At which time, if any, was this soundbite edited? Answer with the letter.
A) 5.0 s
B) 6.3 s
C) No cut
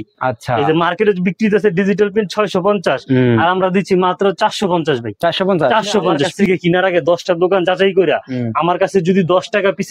B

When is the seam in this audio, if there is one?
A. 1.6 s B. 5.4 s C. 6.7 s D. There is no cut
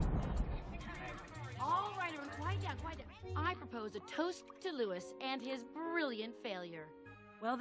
C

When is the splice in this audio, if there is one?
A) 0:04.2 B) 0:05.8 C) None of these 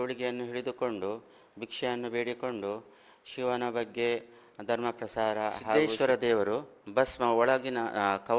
B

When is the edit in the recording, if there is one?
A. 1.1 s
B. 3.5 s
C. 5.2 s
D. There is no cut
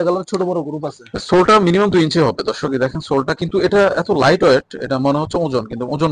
D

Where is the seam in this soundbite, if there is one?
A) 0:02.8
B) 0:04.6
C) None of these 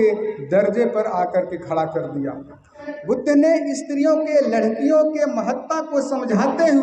A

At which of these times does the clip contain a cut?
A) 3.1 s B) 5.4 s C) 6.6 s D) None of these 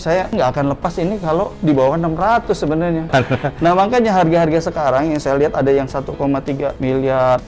A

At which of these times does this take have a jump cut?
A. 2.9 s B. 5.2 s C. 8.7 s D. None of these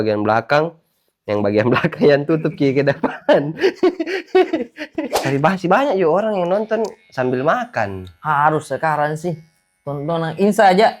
B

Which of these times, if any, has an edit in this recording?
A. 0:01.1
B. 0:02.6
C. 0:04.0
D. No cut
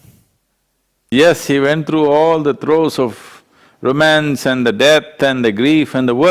A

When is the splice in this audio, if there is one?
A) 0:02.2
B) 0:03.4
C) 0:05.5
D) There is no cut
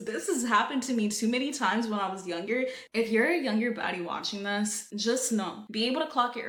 D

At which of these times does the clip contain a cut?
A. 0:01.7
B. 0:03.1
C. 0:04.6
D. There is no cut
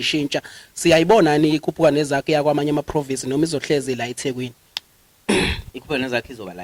D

